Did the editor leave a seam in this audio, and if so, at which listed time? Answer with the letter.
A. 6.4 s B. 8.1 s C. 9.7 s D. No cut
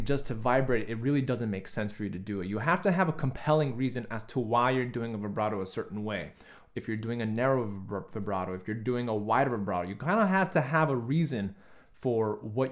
D